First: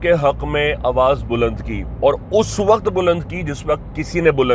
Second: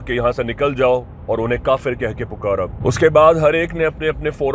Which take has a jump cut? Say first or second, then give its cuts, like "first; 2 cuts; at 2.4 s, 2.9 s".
second; 1 cut; at 2.7 s